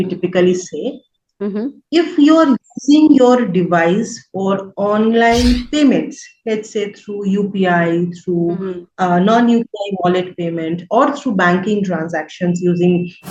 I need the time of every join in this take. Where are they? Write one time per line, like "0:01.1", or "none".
none